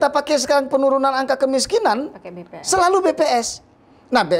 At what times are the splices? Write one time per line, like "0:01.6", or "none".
none